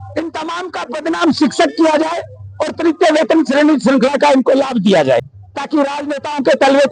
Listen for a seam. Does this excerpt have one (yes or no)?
yes